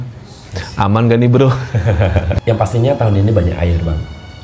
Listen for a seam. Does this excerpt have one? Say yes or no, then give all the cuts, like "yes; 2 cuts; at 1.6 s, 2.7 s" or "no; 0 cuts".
yes; 1 cut; at 2.3 s